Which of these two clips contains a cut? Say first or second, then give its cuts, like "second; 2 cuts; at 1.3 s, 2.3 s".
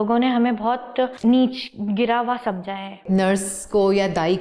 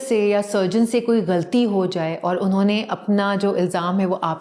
first; 2 cuts; at 1.1 s, 3.0 s